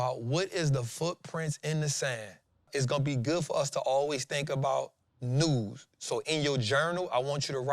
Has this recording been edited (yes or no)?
yes